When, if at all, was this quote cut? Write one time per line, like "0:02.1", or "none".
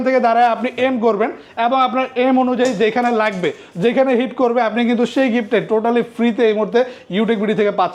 none